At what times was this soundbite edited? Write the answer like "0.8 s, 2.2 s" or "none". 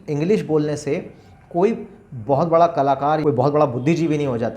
3.2 s